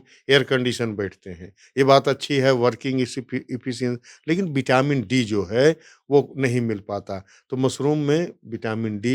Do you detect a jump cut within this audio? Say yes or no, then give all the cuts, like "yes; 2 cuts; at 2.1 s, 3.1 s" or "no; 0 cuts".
no; 0 cuts